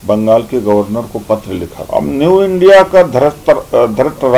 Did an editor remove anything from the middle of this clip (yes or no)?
yes